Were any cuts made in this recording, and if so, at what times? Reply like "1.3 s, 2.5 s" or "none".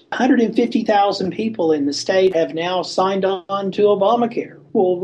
2.3 s